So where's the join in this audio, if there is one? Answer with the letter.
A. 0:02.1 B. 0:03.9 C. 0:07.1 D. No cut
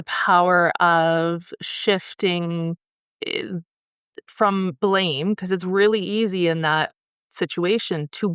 D